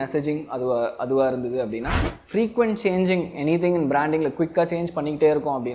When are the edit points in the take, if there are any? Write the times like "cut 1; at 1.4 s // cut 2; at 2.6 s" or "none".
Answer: cut 1; at 2.2 s